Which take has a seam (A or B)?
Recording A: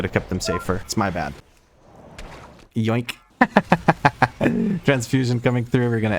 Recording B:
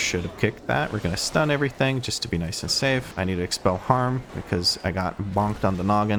A